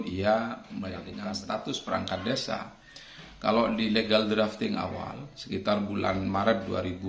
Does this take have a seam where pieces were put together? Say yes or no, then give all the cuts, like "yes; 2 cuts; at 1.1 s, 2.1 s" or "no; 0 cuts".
yes; 1 cut; at 1.1 s